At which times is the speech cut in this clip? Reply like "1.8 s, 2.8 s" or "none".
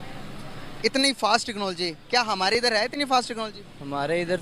none